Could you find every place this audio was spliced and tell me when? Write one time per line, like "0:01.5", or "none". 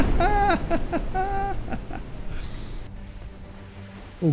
0:02.9